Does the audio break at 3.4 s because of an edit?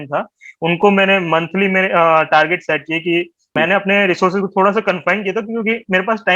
yes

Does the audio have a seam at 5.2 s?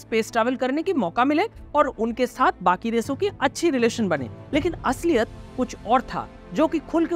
no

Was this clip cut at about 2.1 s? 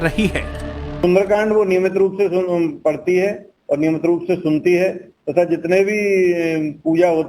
yes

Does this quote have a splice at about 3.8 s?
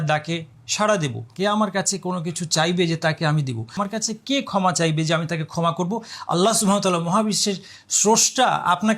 yes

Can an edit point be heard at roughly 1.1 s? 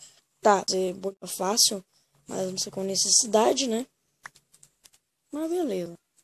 yes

